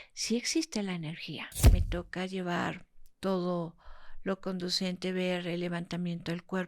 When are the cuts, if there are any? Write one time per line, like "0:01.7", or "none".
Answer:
0:01.7